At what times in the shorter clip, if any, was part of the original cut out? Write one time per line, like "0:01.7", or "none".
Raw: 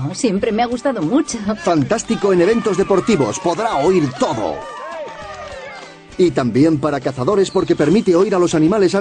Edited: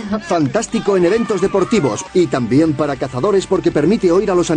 0:02.0